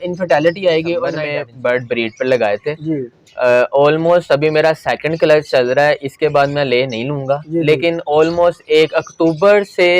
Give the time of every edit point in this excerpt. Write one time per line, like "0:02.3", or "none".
0:01.2